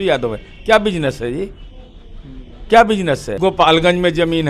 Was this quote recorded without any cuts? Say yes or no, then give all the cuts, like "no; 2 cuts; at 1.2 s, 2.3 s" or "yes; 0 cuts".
no; 1 cut; at 3.4 s